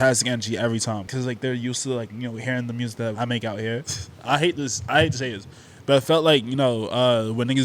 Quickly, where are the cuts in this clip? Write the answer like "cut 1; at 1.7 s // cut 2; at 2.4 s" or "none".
cut 1; at 1.1 s // cut 2; at 3.8 s